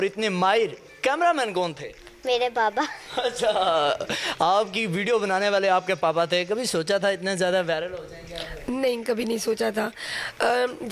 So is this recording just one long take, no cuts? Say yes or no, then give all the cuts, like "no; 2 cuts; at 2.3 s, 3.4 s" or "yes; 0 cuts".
yes; 0 cuts